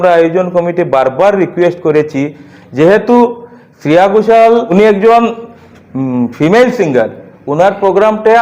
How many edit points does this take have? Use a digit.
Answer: 1